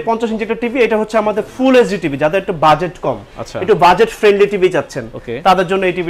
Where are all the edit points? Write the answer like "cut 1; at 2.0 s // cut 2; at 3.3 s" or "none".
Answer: none